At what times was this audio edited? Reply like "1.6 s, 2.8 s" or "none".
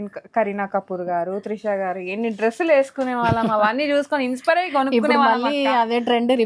none